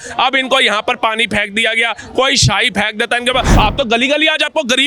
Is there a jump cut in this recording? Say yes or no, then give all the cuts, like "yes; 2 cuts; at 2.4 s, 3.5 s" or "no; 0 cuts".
yes; 1 cut; at 3.5 s